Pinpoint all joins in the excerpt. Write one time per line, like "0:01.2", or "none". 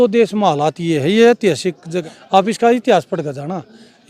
0:01.9